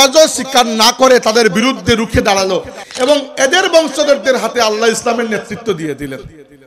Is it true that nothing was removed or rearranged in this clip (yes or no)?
no